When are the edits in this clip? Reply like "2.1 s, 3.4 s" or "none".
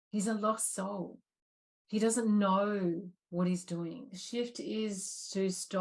4.1 s